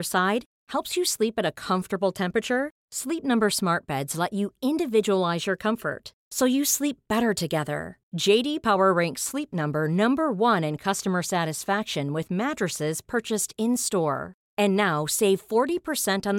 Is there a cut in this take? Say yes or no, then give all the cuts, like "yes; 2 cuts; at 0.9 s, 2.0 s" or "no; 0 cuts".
no; 0 cuts